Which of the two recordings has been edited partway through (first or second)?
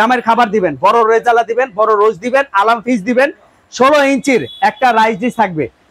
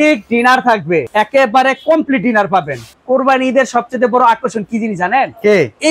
second